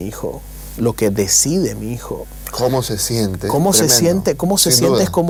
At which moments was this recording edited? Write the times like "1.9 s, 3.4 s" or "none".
none

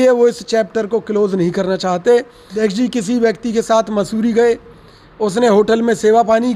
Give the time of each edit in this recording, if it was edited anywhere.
2.5 s

